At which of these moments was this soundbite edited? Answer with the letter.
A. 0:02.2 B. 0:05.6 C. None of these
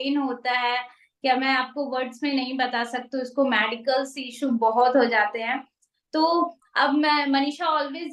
C